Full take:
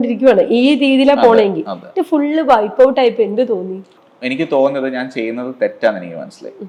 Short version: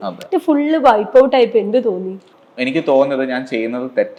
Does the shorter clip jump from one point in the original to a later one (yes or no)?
no